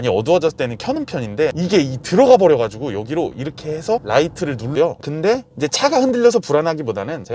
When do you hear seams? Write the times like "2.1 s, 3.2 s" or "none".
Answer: 4.7 s